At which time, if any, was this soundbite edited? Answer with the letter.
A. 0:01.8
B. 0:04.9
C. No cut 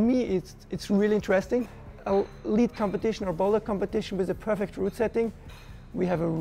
A